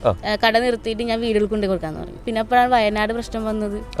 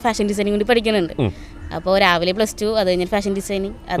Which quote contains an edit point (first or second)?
first